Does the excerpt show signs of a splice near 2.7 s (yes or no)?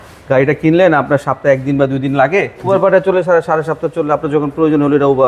yes